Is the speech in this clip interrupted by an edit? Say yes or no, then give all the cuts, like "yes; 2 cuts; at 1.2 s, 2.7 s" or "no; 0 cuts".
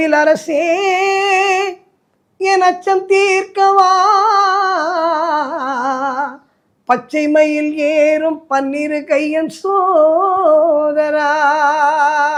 no; 0 cuts